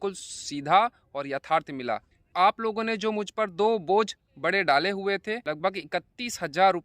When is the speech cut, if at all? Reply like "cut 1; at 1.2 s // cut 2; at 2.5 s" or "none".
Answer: cut 1; at 2.2 s // cut 2; at 5.4 s